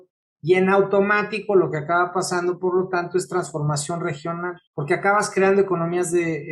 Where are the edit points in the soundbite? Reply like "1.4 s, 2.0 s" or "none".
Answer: 4.6 s